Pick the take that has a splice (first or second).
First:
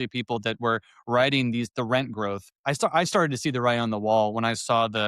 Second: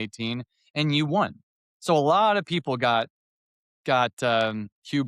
first